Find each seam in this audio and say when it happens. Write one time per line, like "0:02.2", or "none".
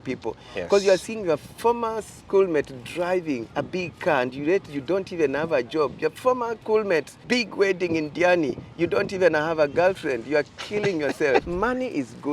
0:03.5
0:06.6
0:07.1
0:11.5